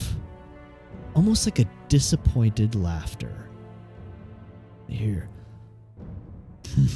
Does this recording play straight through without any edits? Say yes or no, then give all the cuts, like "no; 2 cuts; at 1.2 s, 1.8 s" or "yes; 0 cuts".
yes; 0 cuts